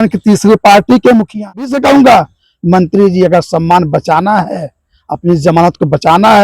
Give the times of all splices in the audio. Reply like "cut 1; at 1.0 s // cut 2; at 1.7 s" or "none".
cut 1; at 1.7 s